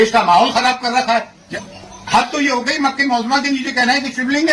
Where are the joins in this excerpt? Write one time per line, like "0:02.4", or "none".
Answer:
0:01.4